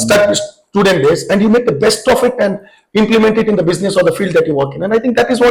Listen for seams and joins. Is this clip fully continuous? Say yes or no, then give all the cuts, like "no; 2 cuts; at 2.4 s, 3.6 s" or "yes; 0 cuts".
yes; 0 cuts